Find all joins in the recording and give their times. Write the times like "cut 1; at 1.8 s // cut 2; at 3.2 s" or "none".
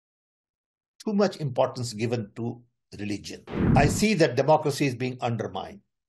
cut 1; at 3.5 s